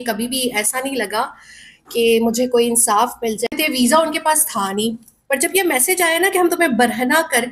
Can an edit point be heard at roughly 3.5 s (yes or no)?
yes